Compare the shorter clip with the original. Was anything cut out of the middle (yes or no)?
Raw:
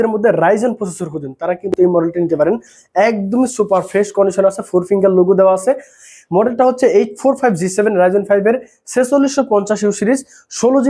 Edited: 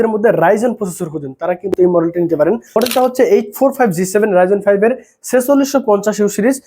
yes